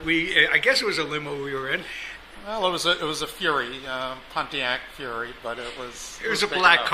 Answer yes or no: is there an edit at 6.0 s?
yes